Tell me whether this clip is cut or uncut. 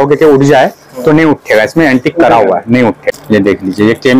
cut